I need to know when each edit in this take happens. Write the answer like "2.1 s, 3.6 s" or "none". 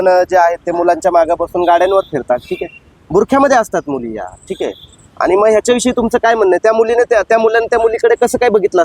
none